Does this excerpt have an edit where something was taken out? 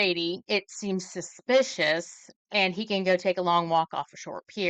no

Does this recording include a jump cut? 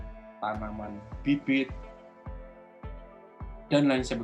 no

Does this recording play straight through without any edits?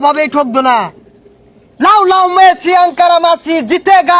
yes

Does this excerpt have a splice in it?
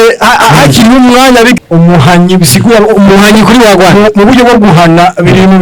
yes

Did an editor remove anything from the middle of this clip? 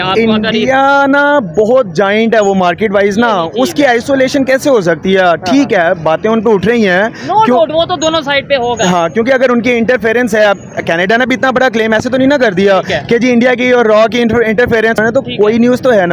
yes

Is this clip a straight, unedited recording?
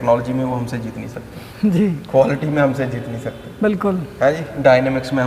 yes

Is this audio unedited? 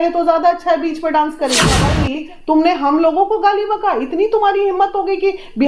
no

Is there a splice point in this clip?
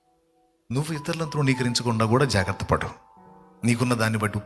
no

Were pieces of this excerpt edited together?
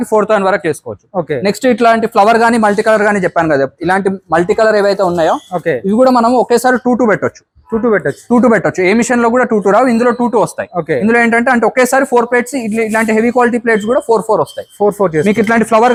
no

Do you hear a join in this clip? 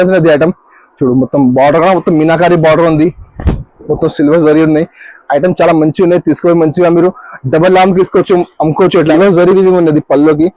yes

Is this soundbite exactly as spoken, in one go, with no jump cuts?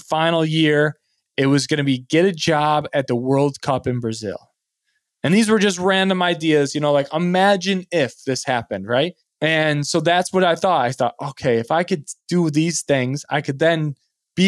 no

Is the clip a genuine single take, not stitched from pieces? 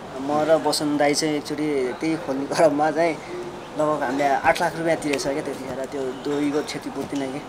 yes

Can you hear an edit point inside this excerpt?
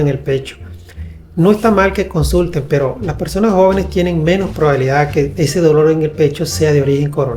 no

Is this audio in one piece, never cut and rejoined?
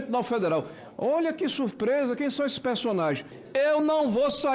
no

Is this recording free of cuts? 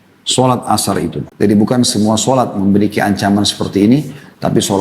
no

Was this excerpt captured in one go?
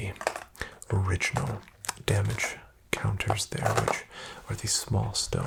yes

